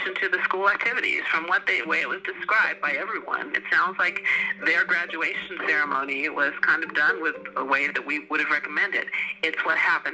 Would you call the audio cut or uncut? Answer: cut